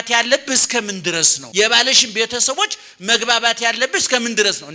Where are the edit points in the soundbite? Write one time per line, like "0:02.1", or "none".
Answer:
0:01.4